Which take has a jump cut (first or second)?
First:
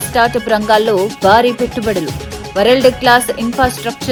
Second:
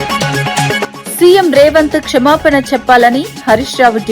second